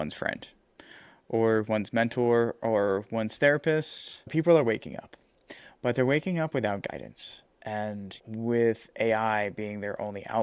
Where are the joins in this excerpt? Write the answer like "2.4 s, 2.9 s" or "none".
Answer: 4.3 s, 8.2 s